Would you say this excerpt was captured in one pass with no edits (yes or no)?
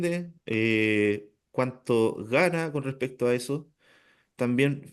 yes